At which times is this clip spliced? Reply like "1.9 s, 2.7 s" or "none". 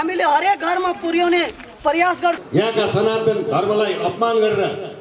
2.4 s

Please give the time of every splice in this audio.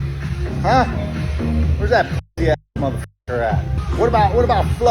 3.8 s

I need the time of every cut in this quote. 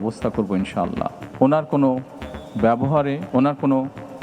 1.2 s, 3.2 s

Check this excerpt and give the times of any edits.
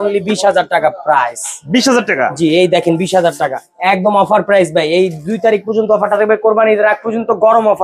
none

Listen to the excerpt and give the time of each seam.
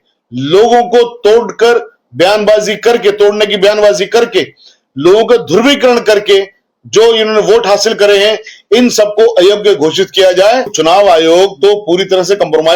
10.7 s

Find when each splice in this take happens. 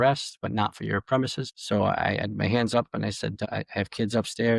1.5 s, 3.4 s

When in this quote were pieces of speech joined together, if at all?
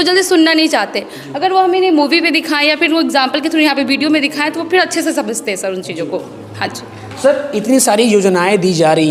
none

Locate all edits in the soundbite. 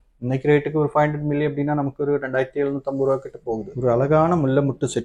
3.7 s

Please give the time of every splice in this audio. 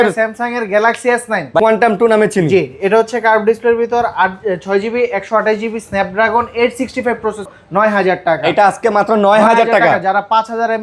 1.6 s, 7.5 s

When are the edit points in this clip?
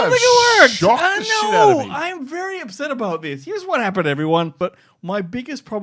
4.6 s

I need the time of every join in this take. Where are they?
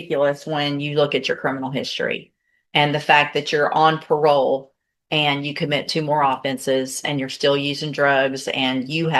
none

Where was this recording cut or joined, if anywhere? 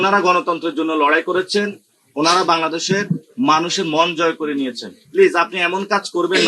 none

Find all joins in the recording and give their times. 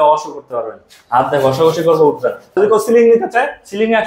2.5 s

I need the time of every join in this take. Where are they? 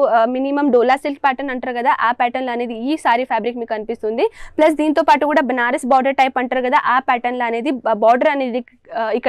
none

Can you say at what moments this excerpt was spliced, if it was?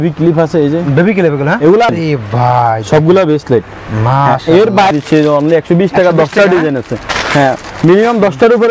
1.9 s, 4.9 s

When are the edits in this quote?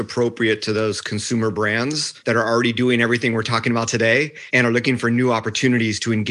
2.1 s, 4.4 s

